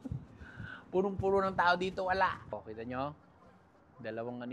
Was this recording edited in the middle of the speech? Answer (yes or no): yes